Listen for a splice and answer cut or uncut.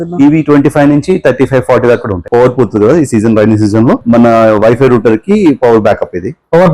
cut